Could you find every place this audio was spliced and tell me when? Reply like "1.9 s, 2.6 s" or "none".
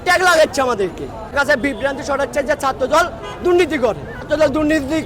1.3 s, 4.2 s